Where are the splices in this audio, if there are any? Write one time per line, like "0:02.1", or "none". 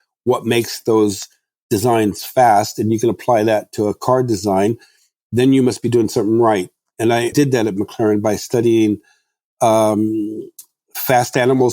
0:07.0